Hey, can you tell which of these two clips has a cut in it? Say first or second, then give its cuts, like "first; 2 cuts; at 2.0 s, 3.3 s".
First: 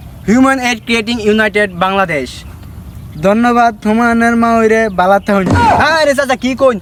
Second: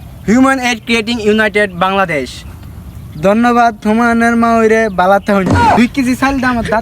second; 1 cut; at 5.8 s